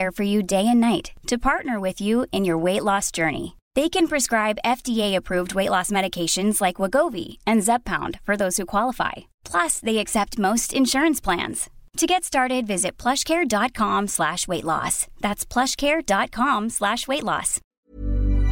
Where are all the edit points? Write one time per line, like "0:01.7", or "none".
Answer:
0:17.6